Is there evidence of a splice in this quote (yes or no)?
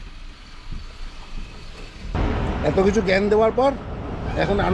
yes